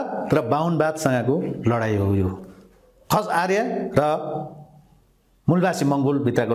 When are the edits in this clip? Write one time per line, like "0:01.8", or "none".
none